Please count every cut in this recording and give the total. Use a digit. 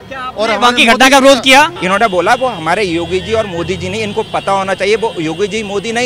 1